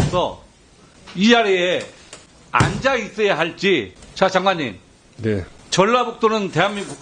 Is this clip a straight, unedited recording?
no; 2 cuts; at 4.0 s, 5.6 s

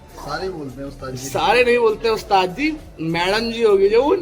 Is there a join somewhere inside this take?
no; 0 cuts

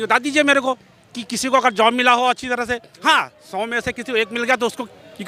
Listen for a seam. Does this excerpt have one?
no; 0 cuts

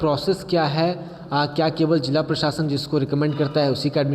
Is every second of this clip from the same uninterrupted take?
yes; 0 cuts

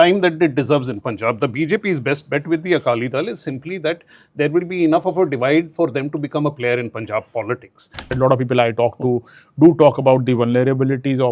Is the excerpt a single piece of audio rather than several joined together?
no; 1 cut; at 8.1 s

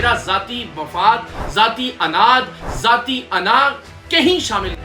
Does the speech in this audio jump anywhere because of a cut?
no; 0 cuts

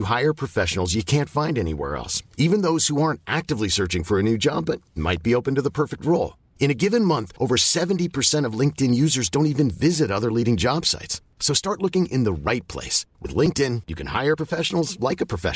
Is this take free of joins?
yes; 0 cuts

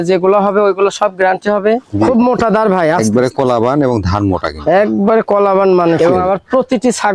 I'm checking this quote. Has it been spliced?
yes; 2 cuts; at 2.1 s, 6.0 s

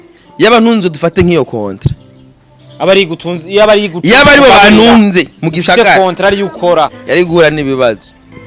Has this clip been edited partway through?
yes; 1 cut; at 6.9 s

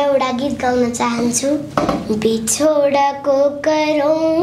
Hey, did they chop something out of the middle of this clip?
yes; 1 cut; at 1.7 s

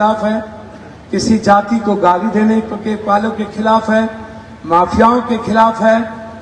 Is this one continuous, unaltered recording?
yes; 0 cuts

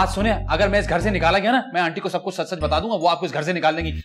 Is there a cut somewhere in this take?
no; 0 cuts

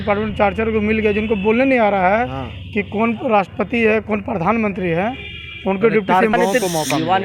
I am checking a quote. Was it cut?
yes; 1 cut; at 6.3 s

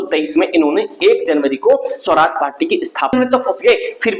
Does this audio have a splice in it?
yes; 1 cut; at 3.1 s

